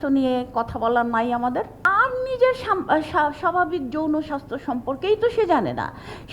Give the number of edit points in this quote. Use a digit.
1